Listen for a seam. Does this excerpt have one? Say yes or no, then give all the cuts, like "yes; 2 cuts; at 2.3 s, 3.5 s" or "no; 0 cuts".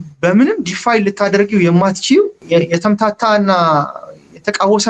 yes; 1 cut; at 2.4 s